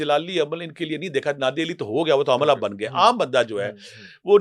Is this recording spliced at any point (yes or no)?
no